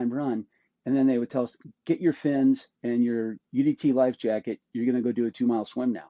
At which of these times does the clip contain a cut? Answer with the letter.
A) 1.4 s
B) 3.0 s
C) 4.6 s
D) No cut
D